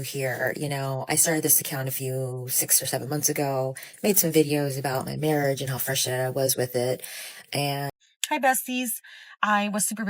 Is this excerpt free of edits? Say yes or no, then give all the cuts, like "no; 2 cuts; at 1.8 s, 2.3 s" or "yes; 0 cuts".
no; 1 cut; at 7.9 s